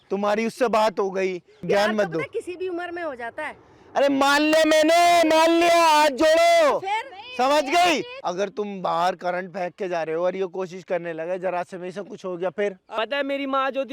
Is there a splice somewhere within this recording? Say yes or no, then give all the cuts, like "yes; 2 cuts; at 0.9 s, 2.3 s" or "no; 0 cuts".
yes; 3 cuts; at 1.6 s, 8.2 s, 13.0 s